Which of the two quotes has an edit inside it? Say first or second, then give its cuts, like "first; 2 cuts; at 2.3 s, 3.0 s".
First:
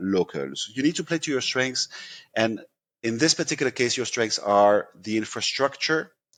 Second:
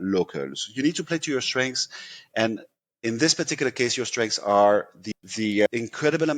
second; 1 cut; at 5.0 s